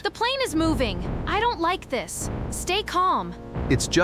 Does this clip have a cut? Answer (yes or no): no